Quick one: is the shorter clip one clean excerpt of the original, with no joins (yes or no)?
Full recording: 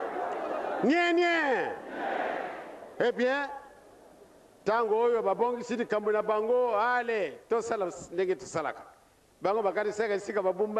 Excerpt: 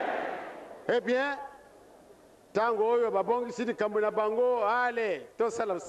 yes